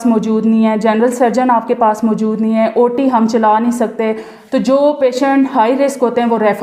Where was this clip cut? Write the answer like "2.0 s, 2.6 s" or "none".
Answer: none

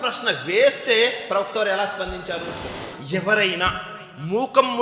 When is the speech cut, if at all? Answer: 2.9 s

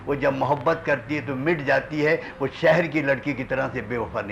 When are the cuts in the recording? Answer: none

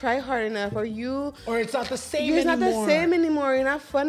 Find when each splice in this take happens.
none

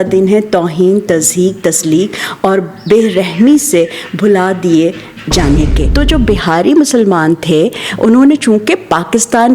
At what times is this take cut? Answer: 5.8 s

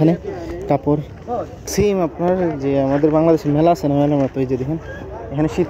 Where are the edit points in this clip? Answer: 1.6 s

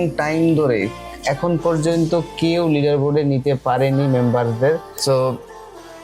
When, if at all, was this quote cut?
4.9 s

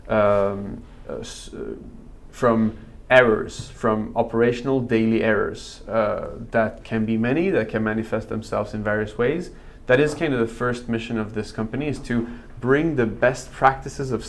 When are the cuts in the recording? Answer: none

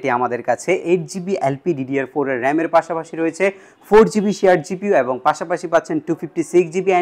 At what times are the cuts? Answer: none

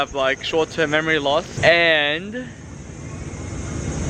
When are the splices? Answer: 1.5 s

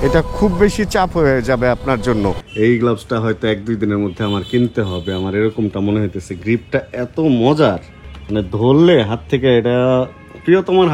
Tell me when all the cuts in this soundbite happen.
2.4 s

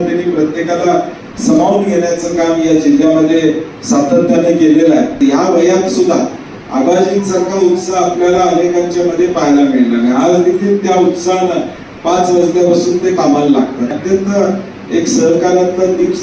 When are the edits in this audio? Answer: 5.1 s, 13.9 s

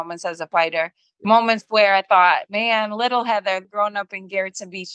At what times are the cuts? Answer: 1.0 s, 3.7 s

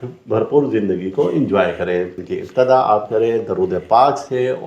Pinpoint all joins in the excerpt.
2.1 s

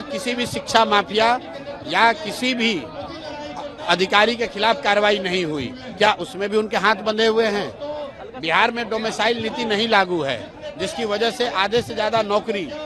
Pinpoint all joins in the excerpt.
none

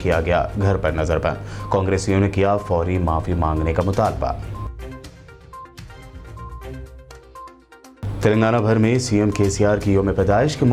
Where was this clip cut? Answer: none

